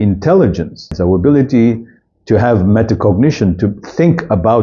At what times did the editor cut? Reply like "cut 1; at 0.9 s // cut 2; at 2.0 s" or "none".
cut 1; at 0.9 s